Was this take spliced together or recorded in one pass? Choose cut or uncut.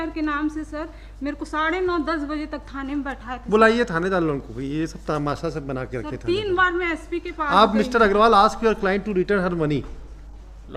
uncut